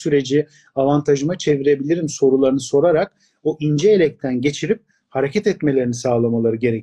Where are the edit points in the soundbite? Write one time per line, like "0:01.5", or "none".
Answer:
none